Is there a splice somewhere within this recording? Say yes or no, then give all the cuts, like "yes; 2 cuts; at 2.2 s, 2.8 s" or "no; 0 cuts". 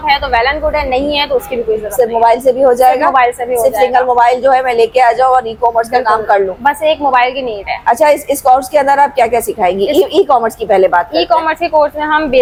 no; 0 cuts